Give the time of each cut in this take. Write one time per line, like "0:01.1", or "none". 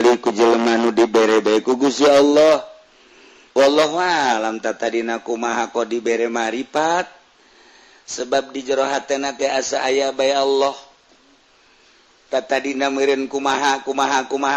none